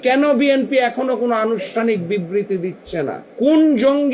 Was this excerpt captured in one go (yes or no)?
no